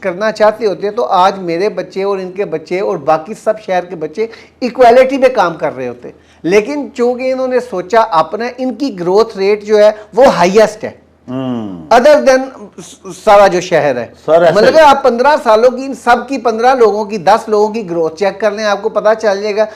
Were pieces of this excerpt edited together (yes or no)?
no